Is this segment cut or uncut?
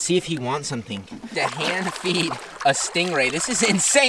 cut